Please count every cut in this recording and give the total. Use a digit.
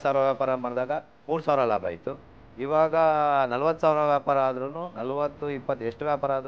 1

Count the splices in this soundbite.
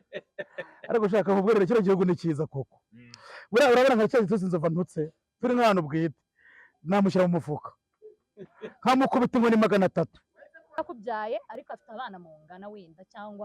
1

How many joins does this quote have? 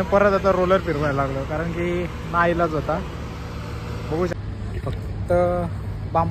1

